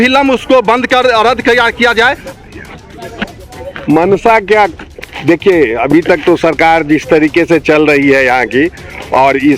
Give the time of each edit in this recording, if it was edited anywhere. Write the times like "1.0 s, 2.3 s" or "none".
2.2 s